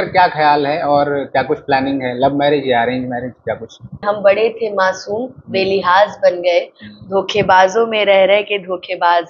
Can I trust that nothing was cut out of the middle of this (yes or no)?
no